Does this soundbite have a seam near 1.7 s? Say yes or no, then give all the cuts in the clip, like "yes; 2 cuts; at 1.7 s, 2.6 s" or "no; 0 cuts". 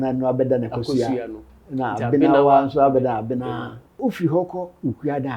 no; 1 cut; at 4.0 s